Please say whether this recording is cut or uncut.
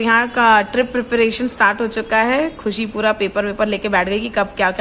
uncut